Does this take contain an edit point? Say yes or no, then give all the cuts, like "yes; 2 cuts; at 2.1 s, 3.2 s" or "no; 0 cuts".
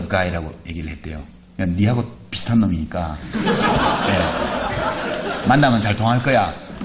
no; 0 cuts